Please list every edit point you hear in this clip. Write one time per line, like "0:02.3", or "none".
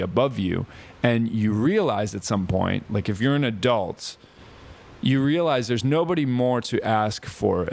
none

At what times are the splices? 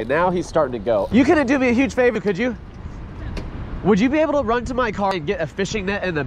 0:01.1
0:05.1

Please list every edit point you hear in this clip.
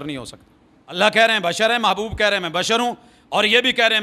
0:01.0

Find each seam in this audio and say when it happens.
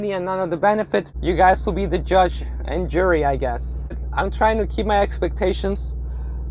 0:01.1
0:04.0

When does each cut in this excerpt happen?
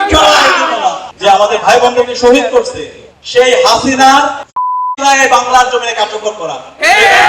0:01.1

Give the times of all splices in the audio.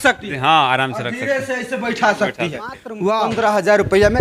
0:03.1

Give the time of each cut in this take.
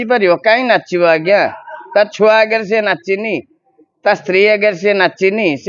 none

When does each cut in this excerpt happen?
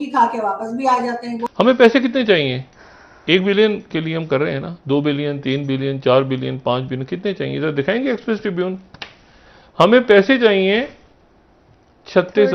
0:01.4

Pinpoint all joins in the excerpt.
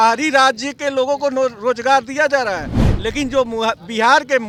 none

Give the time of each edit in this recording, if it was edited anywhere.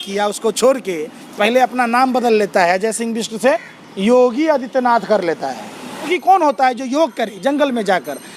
0:06.1

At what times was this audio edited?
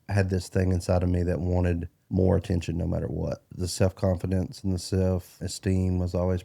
0:01.9
0:03.5
0:05.4

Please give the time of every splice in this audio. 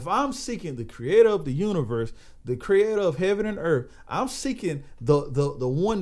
none

